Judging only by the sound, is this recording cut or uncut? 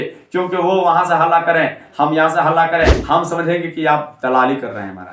cut